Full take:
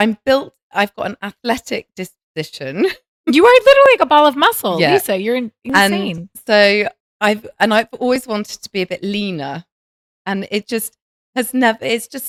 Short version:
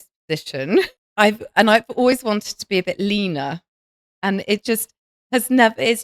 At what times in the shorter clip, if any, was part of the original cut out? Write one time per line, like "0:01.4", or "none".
0:01.0